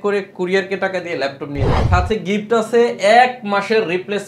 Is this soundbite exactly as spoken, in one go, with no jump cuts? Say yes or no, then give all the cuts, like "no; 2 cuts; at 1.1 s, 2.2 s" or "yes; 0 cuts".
no; 1 cut; at 1.8 s